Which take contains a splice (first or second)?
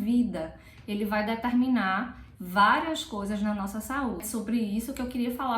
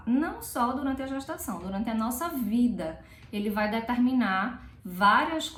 first